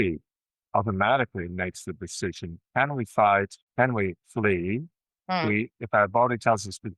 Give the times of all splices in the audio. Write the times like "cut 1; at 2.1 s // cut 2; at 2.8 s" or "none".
cut 1; at 3.6 s